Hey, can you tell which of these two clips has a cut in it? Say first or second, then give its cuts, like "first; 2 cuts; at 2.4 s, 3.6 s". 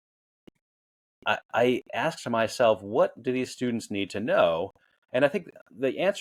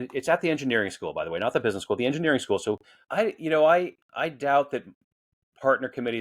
second; 1 cut; at 3.0 s